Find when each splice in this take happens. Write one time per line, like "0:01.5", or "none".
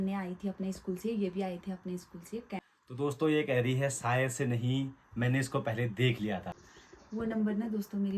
0:02.7
0:06.5